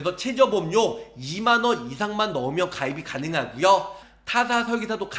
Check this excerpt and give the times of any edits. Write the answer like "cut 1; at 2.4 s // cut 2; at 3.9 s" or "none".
cut 1; at 4.0 s